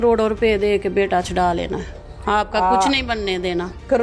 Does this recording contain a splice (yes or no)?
no